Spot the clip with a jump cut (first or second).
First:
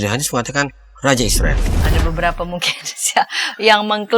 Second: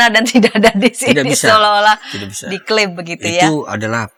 first